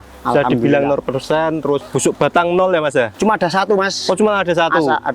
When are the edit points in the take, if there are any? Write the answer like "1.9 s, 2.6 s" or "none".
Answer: 1.9 s, 3.1 s